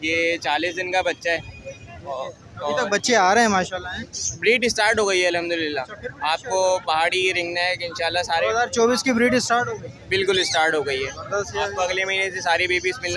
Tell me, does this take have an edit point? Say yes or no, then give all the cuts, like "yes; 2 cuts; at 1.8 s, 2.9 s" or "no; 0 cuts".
no; 0 cuts